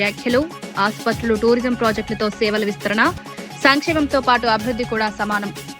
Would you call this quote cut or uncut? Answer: uncut